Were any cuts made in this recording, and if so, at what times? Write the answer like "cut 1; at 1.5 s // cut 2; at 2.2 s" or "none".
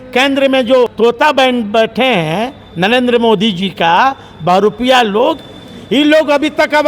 cut 1; at 0.9 s